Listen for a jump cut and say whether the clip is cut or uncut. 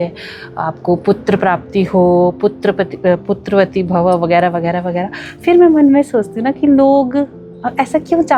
uncut